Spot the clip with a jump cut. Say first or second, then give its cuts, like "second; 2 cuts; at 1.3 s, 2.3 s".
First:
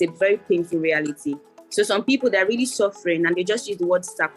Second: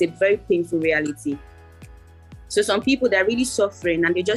first; 1 cut; at 1.5 s